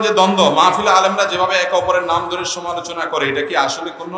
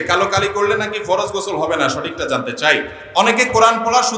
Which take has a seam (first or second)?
second